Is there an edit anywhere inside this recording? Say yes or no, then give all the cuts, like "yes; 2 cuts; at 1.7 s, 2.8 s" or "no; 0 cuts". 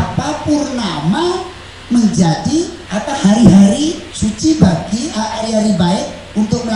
yes; 2 cuts; at 2.8 s, 4.1 s